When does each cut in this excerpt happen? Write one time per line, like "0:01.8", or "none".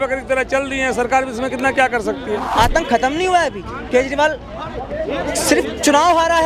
0:02.4